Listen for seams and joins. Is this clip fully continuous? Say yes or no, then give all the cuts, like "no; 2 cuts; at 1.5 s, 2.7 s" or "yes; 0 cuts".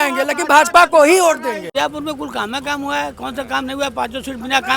no; 1 cut; at 1.7 s